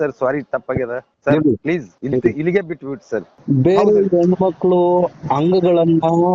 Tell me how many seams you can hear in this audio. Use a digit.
3